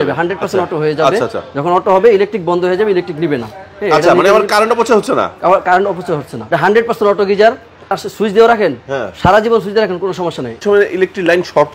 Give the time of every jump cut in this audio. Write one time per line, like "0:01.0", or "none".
0:08.0
0:10.6